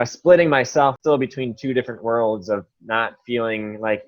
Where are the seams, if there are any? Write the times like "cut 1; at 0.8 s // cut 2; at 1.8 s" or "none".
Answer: cut 1; at 1.0 s

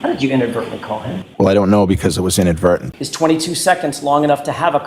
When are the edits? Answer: cut 1; at 1.2 s // cut 2; at 3.0 s

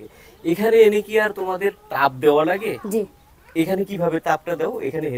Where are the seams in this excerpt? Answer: none

